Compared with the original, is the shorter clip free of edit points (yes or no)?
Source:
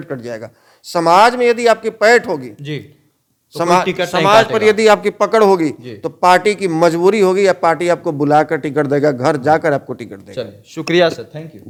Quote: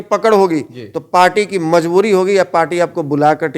yes